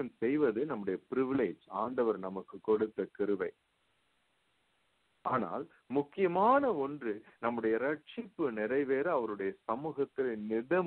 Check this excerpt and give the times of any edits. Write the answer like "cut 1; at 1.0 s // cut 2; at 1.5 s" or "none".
none